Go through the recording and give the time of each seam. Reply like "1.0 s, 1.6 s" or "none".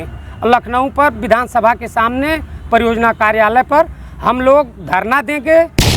none